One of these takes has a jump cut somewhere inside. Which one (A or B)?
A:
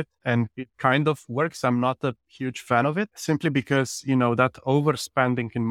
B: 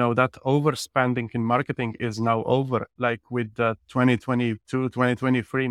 A